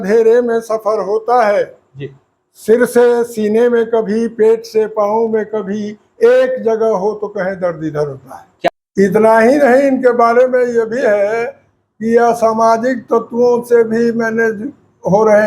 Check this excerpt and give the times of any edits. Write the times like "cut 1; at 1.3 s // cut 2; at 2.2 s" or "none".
cut 1; at 8.7 s